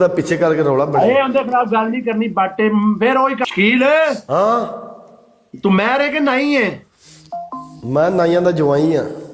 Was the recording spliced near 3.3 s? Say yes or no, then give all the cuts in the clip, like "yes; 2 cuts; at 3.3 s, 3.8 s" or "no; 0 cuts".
yes; 1 cut; at 3.3 s